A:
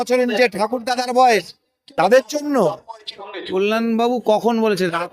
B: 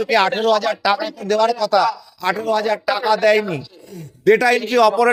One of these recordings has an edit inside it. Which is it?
A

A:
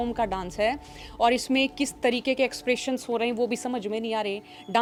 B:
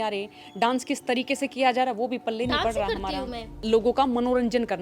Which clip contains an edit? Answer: B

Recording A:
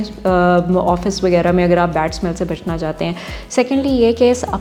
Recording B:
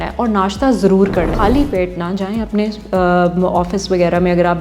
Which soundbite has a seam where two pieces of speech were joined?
B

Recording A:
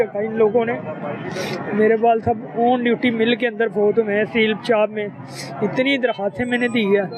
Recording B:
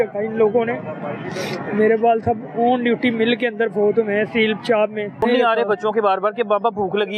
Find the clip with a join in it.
B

